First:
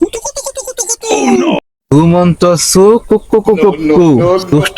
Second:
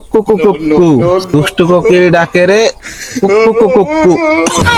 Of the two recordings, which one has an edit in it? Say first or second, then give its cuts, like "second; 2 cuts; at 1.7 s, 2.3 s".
first; 1 cut; at 1.6 s